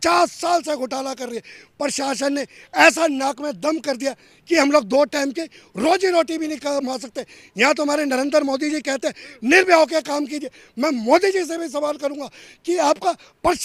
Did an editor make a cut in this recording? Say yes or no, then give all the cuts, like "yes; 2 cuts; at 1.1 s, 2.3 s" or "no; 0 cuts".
no; 0 cuts